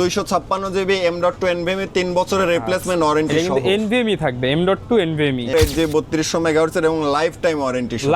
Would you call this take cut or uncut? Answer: cut